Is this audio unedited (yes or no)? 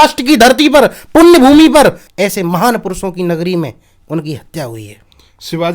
yes